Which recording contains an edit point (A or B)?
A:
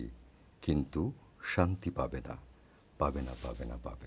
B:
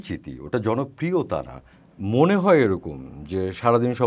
B